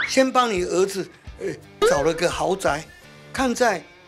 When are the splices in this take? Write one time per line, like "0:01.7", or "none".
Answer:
0:03.2